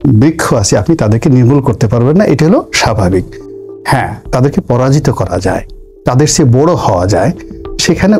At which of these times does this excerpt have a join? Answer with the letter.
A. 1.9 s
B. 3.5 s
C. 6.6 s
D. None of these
D